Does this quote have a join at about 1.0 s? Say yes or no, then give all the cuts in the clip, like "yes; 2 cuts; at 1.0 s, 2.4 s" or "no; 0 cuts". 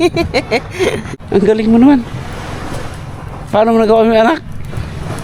yes; 1 cut; at 1.0 s